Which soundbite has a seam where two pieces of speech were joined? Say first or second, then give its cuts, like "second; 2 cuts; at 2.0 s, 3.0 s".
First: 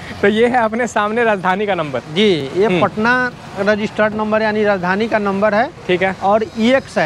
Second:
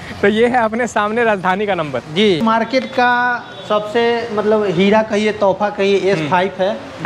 second; 1 cut; at 2.4 s